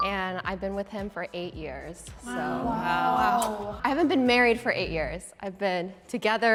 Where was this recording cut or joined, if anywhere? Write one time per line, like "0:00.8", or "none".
none